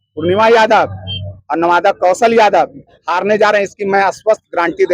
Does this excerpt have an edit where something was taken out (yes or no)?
no